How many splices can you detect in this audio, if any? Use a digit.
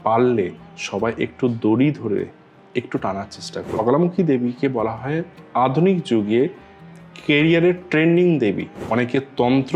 2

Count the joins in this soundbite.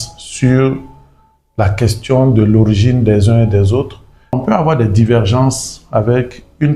1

